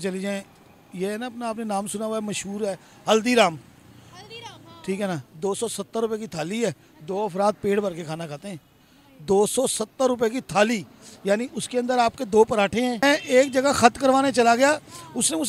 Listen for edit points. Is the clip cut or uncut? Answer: cut